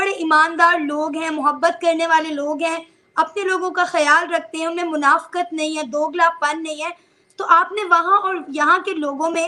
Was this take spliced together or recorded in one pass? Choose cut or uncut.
uncut